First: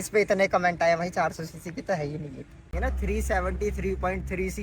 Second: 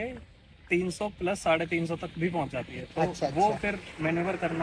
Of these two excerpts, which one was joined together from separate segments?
first; 1 cut; at 2.7 s

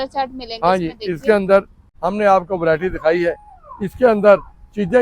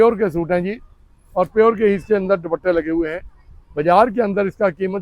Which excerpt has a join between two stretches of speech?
first; 1 cut; at 1.9 s

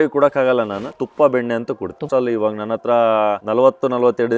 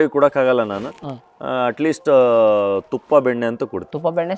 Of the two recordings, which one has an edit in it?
first; 2 cuts; at 1.0 s, 2.1 s

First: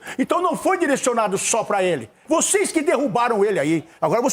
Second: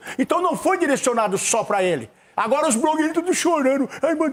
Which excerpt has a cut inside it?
first; 1 cut; at 2.2 s

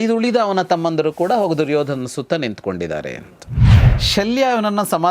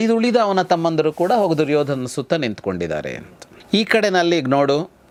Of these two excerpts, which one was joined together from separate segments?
first; 1 cut; at 3.6 s

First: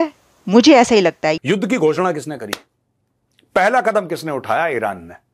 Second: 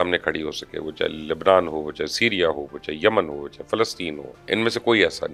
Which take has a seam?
first; 1 cut; at 1.3 s

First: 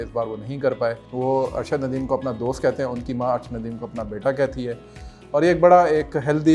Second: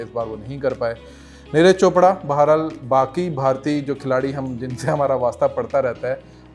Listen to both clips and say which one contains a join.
first; 1 cut; at 1.1 s

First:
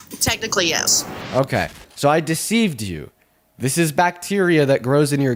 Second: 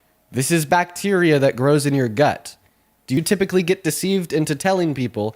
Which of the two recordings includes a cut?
second; 1 cut; at 3.2 s

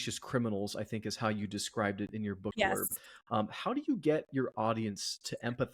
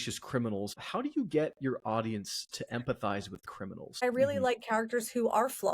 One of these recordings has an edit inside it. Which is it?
second; 2 cuts; at 0.8 s, 4.0 s

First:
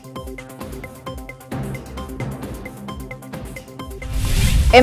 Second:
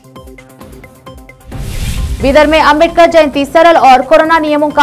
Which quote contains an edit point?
second; 1 cut; at 1.2 s

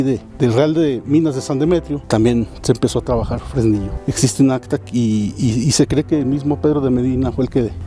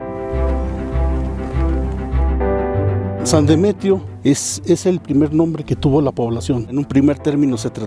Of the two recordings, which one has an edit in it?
second; 2 cuts; at 1.2 s, 3.3 s

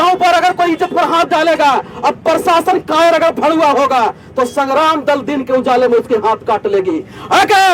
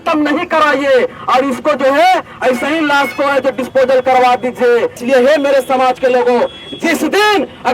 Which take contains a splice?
second; 1 cut; at 5.0 s

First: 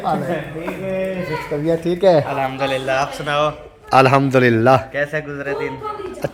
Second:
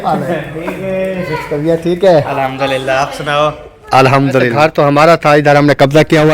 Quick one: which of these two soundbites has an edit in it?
second; 1 cut; at 4.5 s

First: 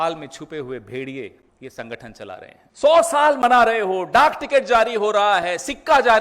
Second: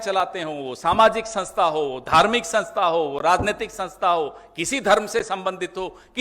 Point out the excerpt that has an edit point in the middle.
first; 2 cuts; at 1.5 s, 2.6 s

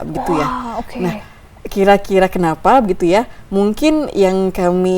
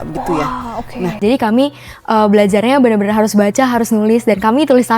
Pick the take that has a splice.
second; 1 cut; at 1.2 s

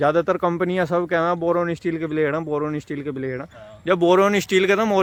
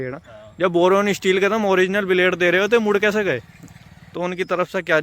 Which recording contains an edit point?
second; 1 cut; at 4.0 s

